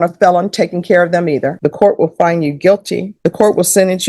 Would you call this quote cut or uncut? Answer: cut